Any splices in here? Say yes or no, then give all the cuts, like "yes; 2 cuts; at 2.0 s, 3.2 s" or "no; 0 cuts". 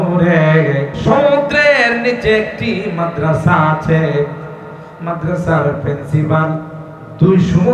yes; 1 cut; at 0.9 s